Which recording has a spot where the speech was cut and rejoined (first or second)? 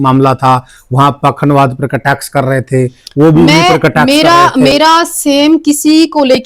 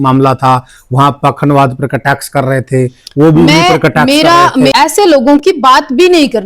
second